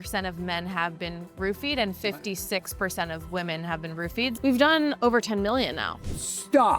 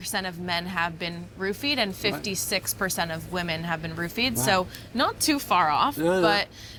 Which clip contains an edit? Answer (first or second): first